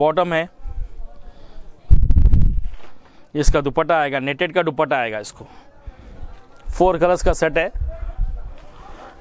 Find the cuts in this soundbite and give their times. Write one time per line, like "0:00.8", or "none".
none